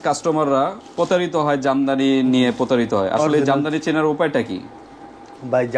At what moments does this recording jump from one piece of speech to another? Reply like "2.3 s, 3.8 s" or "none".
none